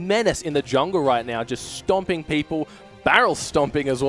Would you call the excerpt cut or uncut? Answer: uncut